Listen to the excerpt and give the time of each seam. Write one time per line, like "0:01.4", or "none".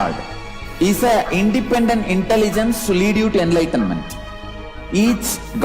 0:02.8